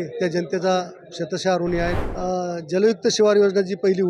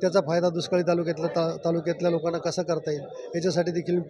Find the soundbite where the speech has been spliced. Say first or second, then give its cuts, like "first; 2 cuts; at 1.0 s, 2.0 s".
first; 1 cut; at 2.0 s